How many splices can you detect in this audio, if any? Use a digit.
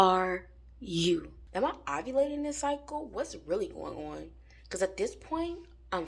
1